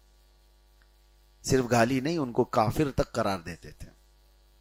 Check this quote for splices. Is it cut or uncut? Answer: uncut